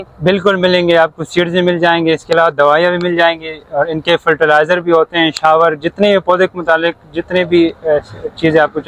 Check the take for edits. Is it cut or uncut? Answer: uncut